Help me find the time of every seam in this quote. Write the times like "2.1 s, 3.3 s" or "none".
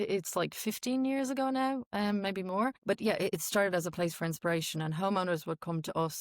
2.8 s